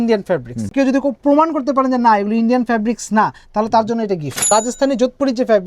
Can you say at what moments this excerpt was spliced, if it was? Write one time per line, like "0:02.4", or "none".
0:00.7
0:04.4